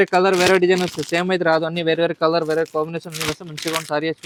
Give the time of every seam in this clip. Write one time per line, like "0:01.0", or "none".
none